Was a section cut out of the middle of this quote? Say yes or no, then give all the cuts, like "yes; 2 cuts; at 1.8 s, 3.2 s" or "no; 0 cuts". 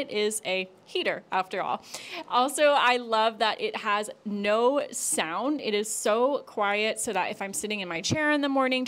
no; 0 cuts